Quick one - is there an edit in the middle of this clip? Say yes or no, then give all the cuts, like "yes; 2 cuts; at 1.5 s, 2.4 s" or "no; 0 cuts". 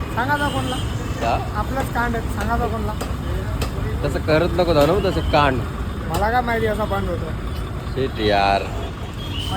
no; 0 cuts